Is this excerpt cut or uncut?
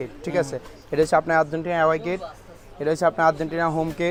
uncut